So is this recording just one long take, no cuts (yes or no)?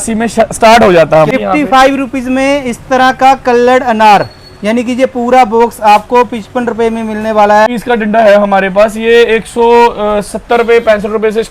no